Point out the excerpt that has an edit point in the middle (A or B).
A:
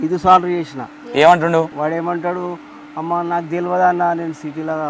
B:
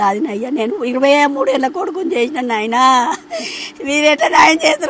A